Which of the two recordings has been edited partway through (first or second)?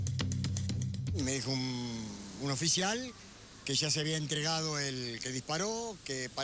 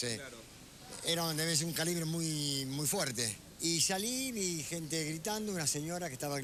first